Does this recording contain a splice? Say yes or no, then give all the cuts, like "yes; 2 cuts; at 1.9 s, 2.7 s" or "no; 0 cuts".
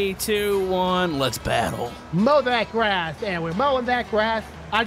no; 0 cuts